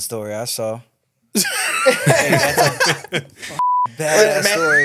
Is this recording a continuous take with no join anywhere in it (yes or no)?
yes